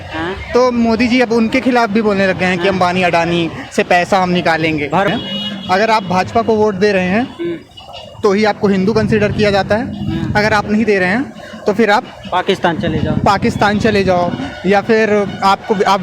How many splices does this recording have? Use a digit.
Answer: 1